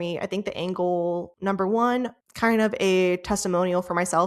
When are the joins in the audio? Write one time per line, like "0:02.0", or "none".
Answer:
0:01.3
0:02.2